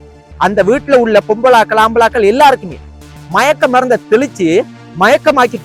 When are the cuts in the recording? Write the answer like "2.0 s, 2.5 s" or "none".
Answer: none

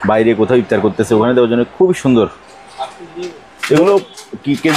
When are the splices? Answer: none

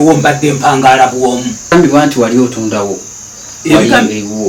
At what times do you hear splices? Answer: 1.7 s

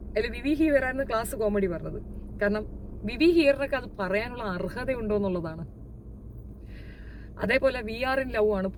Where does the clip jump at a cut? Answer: none

